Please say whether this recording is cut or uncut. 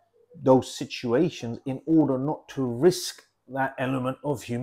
uncut